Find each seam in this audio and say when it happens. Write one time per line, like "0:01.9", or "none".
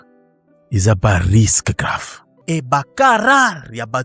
0:02.4